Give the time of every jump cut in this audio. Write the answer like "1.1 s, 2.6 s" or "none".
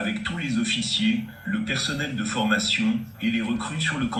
none